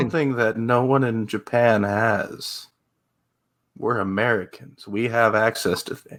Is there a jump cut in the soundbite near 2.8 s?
no; 0 cuts

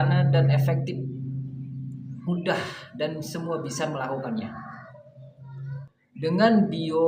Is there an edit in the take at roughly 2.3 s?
yes; 2 cuts; at 2.3 s, 5.9 s

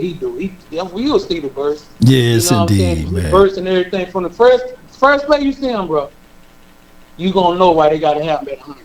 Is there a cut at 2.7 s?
no; 0 cuts

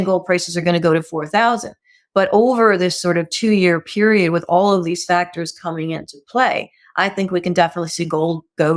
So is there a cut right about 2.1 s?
no; 0 cuts

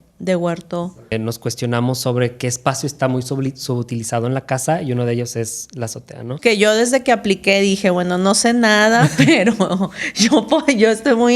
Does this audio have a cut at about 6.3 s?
yes; 2 cuts; at 1.1 s, 6.3 s

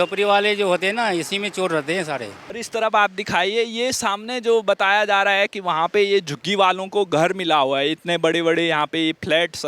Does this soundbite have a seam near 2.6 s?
yes; 1 cut; at 2.6 s

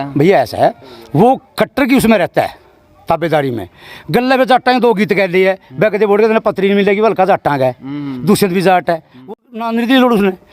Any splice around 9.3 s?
yes; 1 cut; at 9.3 s

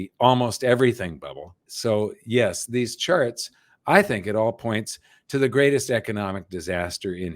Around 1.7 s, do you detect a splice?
yes; 2 cuts; at 1.7 s, 2.6 s

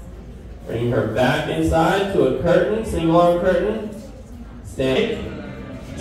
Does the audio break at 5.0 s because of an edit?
yes; 1 cut; at 5.0 s

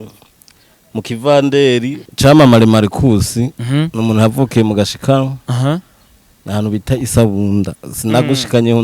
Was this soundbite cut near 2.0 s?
yes; 1 cut; at 2.0 s

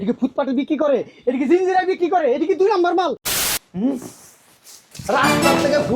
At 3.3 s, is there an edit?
yes; 1 cut; at 3.3 s

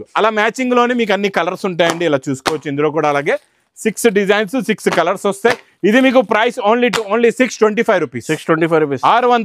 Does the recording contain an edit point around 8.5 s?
no; 0 cuts

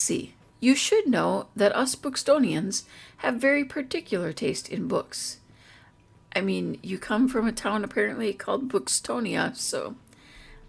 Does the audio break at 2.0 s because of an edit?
no; 0 cuts

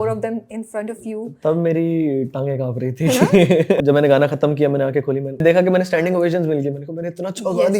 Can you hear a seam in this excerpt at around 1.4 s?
no; 2 cuts; at 3.8 s, 5.4 s

